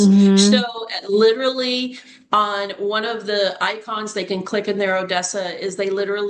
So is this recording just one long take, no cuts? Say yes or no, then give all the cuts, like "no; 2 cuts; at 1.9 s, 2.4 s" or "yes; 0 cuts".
yes; 0 cuts